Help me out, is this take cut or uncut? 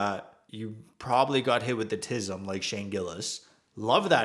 uncut